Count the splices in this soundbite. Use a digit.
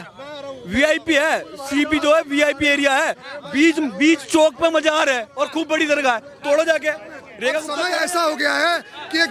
1